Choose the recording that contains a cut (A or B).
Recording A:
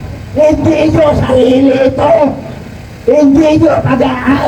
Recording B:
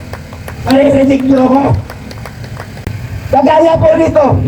B